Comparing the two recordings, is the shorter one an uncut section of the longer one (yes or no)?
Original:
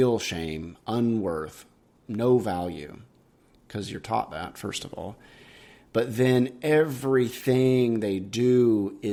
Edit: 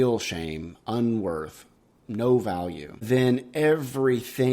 no